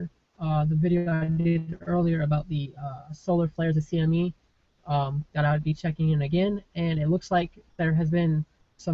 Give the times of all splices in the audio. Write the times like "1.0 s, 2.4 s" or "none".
5.6 s

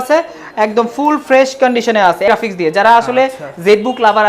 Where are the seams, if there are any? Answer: 2.3 s

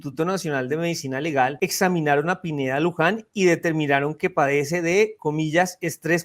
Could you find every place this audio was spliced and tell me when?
1.5 s

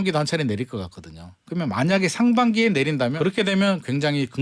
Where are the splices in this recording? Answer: 3.2 s

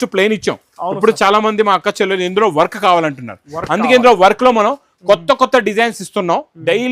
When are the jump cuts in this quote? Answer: none

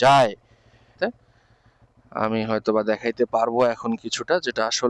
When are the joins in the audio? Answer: 0.9 s

